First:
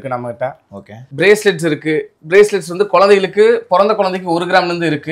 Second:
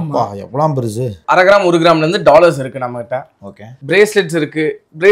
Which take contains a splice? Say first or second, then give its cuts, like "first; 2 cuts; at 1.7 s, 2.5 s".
second; 1 cut; at 1.2 s